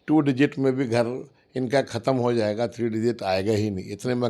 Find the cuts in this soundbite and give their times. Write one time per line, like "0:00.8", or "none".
none